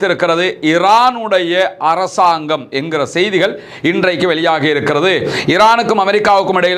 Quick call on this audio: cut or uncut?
uncut